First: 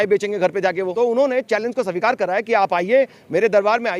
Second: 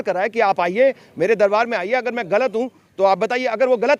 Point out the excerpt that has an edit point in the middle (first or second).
first